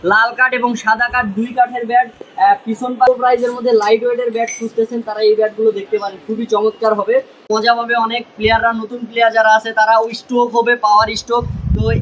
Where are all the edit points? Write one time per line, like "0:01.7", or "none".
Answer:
0:03.1
0:07.4